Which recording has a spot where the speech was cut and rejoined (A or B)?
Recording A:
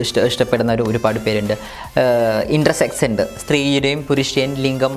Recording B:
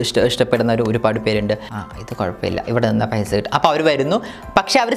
B